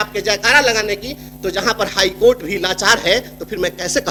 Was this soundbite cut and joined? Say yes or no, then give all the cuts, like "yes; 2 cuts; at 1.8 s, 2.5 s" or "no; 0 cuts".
no; 0 cuts